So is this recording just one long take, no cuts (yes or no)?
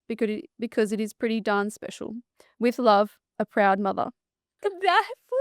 no